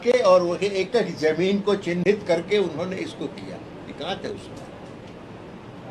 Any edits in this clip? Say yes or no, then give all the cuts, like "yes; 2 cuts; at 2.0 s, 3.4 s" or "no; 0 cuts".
no; 0 cuts